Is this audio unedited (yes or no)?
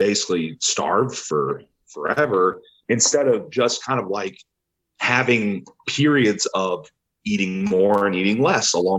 no